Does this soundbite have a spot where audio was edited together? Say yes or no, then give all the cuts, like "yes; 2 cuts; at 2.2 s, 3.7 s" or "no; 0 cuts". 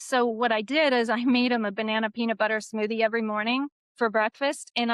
yes; 1 cut; at 3.8 s